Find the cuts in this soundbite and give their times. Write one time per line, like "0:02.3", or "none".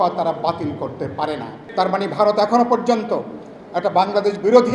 0:01.6